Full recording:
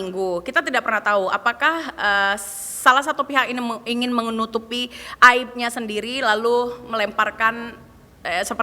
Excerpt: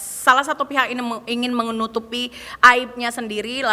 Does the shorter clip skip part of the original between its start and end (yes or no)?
no